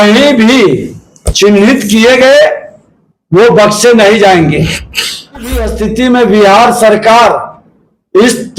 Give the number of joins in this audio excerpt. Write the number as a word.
one